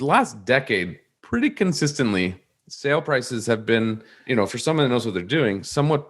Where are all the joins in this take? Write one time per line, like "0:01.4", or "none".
0:04.1

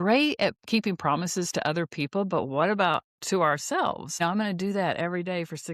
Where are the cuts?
0:04.1

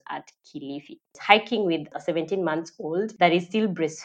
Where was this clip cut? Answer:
0:01.1
0:01.9
0:03.1

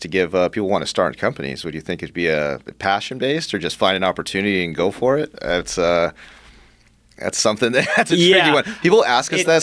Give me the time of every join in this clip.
none

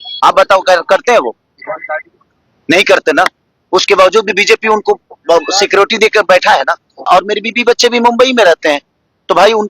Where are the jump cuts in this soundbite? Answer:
0:07.1

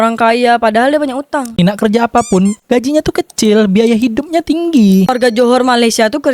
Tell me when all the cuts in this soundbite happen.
0:01.6
0:05.1

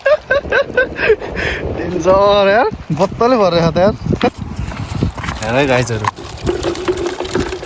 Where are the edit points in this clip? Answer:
0:04.3

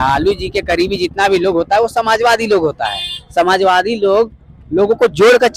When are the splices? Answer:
none

